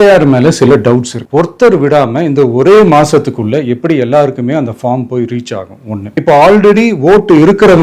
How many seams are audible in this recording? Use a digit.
2